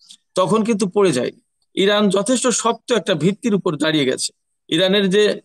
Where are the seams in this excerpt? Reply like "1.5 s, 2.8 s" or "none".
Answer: 1.6 s

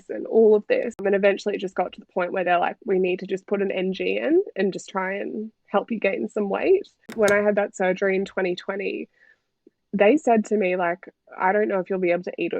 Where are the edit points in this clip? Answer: 7.1 s

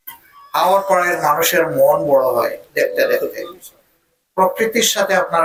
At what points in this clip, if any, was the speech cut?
none

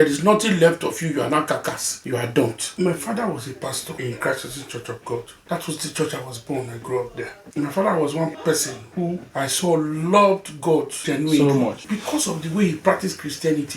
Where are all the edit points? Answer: 1.9 s, 2.6 s, 3.9 s, 5.4 s, 7.4 s, 8.3 s, 9.3 s, 11.0 s, 11.8 s

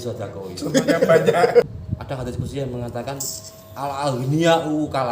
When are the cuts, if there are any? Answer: 1.6 s

